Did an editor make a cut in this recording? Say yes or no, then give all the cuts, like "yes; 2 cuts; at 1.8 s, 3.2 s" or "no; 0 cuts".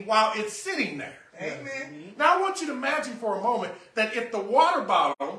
no; 0 cuts